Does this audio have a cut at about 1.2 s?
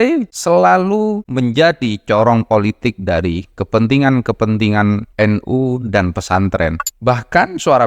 yes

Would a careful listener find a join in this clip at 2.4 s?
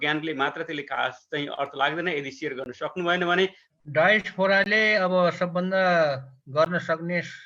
no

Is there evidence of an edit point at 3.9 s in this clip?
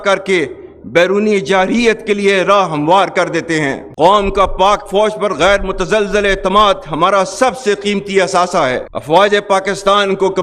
no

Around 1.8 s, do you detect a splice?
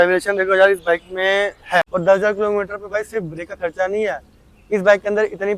yes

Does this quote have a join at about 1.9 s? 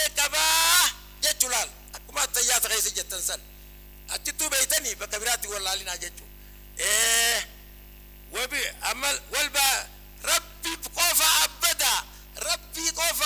no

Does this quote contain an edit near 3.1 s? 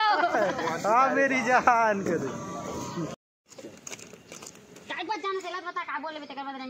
yes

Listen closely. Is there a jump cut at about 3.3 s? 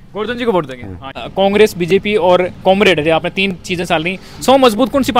no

